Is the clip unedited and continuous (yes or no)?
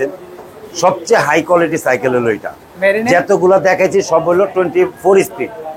yes